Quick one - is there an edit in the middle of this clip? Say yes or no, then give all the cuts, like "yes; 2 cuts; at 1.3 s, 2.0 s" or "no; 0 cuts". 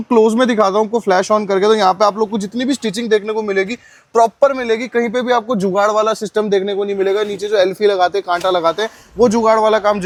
no; 0 cuts